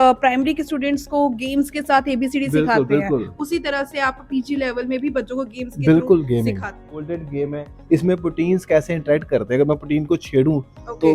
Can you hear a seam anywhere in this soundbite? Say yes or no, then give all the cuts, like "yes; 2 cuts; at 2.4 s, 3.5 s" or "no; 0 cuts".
yes; 1 cut; at 7.0 s